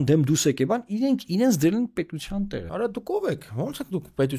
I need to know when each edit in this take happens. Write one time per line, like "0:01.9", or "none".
0:02.7